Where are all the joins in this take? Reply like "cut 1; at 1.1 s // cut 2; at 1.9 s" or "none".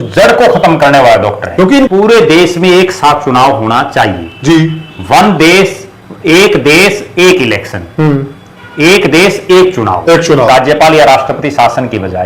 cut 1; at 1.9 s // cut 2; at 10.5 s